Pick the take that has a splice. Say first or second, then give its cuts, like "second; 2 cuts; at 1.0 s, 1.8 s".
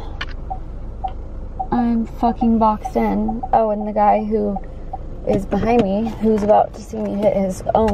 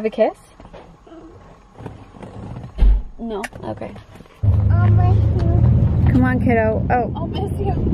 second; 1 cut; at 4.4 s